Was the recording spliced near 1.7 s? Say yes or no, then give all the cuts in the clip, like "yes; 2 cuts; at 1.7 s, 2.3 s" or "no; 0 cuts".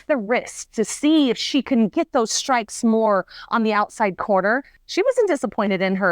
no; 1 cut; at 4.8 s